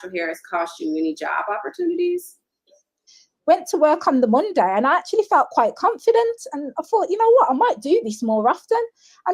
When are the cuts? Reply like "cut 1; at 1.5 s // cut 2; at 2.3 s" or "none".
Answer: cut 1; at 3.0 s